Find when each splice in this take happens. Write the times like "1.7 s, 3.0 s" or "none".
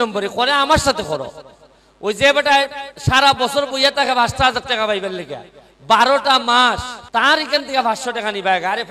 6.9 s